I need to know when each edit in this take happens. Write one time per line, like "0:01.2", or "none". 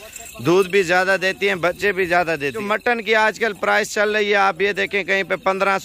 0:02.6